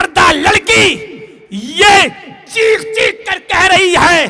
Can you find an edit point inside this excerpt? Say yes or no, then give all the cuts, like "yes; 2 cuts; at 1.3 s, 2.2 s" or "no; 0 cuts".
no; 0 cuts